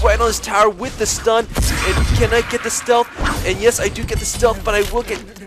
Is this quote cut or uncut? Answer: uncut